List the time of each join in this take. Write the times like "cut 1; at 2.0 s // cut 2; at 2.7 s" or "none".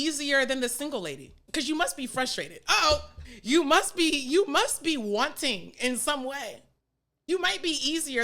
cut 1; at 1.5 s // cut 2; at 3.2 s // cut 3; at 7.1 s